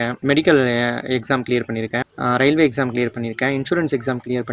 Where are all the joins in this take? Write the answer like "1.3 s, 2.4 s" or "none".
none